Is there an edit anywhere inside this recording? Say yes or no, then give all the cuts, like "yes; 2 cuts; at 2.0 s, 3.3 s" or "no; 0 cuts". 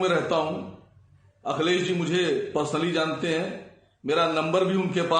no; 0 cuts